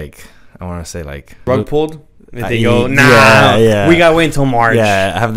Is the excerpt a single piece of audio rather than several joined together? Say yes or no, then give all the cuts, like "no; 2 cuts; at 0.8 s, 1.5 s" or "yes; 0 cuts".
no; 1 cut; at 1.4 s